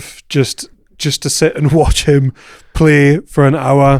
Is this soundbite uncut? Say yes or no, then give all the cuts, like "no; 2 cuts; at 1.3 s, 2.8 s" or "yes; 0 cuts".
yes; 0 cuts